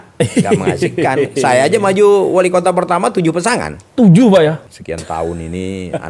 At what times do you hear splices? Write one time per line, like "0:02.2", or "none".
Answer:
0:04.7